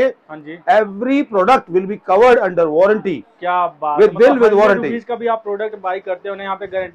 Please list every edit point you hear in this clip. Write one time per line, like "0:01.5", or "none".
none